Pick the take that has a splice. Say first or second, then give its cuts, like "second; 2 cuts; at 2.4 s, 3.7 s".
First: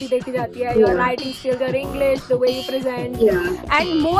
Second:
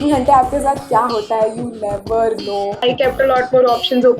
second; 1 cut; at 2.7 s